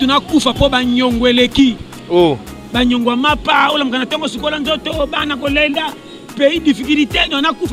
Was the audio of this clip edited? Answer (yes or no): no